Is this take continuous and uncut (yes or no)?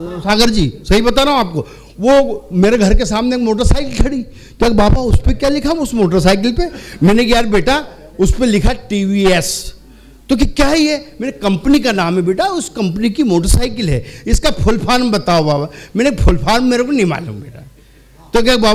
yes